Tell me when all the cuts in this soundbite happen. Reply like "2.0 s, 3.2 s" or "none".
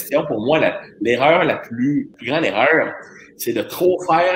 2.2 s